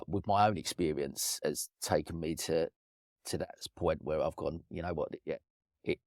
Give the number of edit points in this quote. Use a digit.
1